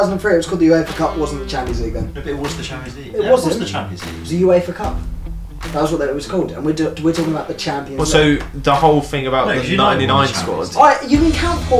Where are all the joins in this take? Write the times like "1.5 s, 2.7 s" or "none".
none